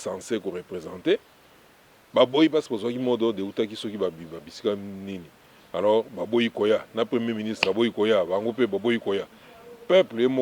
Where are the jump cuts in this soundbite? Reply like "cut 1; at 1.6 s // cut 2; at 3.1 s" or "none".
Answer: none